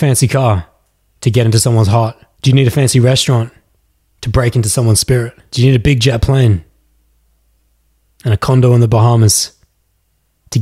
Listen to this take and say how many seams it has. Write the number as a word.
two